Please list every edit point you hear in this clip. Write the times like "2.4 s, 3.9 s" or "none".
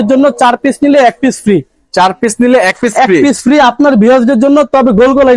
none